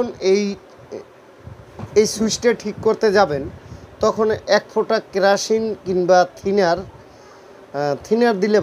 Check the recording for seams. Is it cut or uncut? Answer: uncut